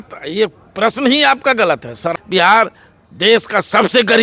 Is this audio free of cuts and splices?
no; 1 cut; at 2.1 s

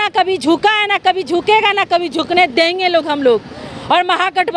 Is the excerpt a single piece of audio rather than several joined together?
yes; 0 cuts

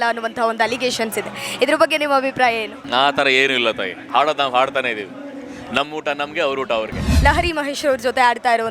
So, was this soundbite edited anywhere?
yes; 2 cuts; at 2.7 s, 7.0 s

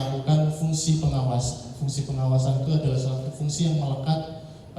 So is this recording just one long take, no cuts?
yes; 0 cuts

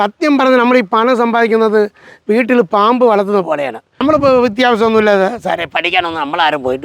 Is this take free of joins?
no; 1 cut; at 3.9 s

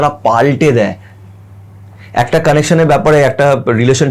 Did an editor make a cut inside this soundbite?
no; 0 cuts

